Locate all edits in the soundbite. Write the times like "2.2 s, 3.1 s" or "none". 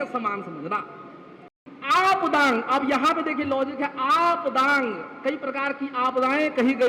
1.5 s